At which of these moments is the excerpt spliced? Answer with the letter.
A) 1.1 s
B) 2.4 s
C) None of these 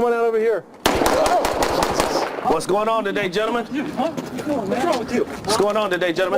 B